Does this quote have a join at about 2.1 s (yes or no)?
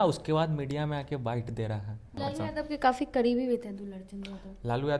yes